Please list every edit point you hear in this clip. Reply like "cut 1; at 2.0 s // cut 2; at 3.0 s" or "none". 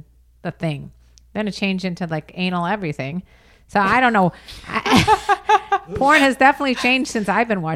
none